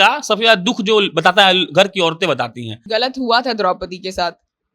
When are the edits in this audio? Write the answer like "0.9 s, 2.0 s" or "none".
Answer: 2.8 s

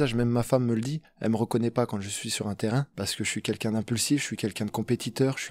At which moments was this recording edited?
1.0 s, 2.9 s

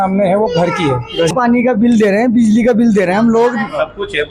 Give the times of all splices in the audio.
1.3 s

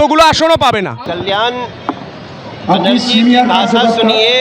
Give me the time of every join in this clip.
1.0 s

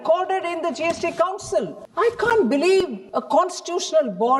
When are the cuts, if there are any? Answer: 1.8 s, 3.1 s

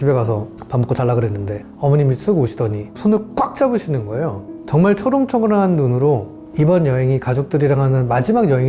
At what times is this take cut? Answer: 2.9 s, 4.5 s, 6.3 s

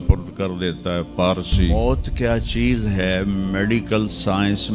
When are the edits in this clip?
1.7 s

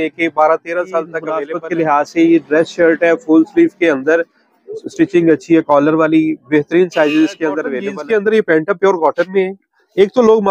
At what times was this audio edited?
1.5 s, 7.8 s

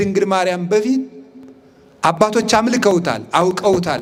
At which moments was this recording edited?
none

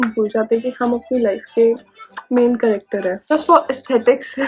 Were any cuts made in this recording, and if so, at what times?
3.3 s

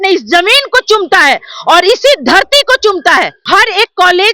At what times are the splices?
3.4 s

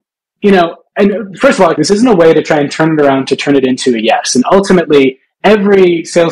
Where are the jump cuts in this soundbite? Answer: 1.8 s

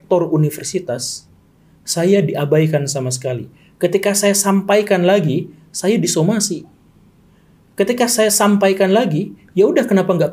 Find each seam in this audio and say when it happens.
none

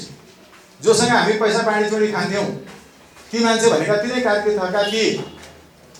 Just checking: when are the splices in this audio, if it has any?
none

